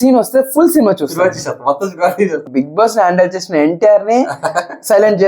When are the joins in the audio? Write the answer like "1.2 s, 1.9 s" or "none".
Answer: 2.4 s